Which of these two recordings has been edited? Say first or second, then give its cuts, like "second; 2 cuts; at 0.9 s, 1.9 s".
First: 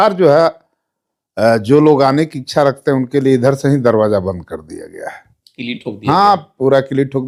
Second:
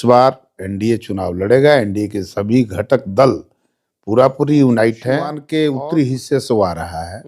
second; 1 cut; at 5.4 s